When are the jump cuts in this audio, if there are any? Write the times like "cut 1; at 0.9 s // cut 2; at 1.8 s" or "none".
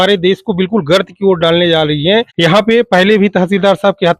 cut 1; at 2.3 s